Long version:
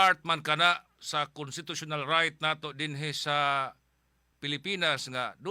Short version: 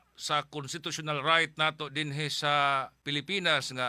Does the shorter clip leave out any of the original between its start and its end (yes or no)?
yes